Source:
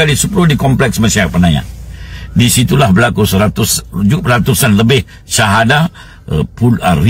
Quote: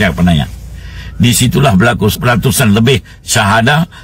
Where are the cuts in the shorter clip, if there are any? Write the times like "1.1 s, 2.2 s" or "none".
2.1 s